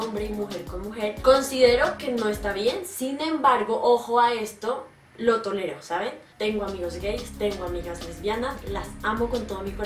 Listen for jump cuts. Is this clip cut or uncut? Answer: cut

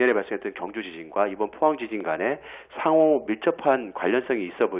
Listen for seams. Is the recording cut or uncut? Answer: uncut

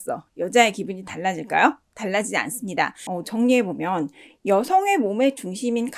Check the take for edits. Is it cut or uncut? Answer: cut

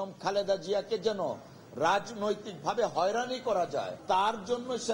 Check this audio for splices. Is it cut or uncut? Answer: cut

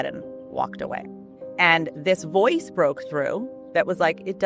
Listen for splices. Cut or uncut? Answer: uncut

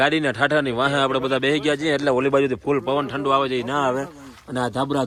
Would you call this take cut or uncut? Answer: uncut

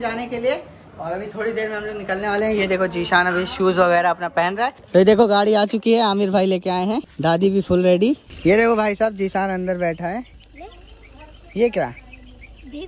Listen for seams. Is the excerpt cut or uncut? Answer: cut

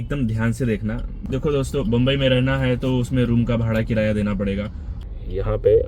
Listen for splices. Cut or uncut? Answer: cut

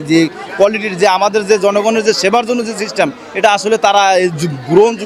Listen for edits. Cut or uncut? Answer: uncut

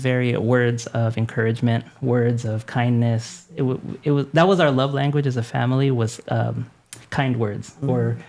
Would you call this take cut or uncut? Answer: uncut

